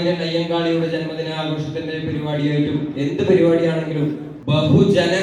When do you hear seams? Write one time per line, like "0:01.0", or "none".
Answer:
0:04.3